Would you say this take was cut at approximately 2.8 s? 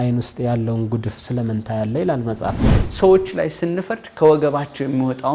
yes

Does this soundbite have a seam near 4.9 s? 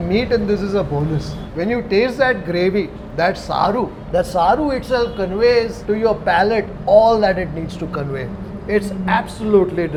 no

